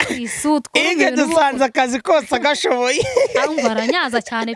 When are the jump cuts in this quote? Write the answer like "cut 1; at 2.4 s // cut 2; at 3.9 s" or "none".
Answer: none